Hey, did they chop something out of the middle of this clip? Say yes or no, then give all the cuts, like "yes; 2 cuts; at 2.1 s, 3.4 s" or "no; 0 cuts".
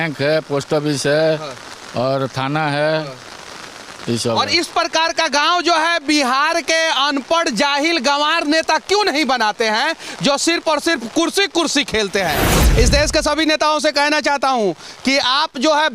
yes; 1 cut; at 12.6 s